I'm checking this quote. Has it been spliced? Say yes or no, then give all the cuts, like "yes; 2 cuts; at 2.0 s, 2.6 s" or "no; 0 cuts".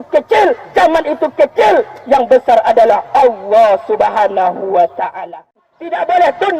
yes; 1 cut; at 5.7 s